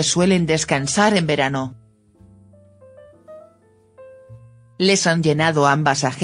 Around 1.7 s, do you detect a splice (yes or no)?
yes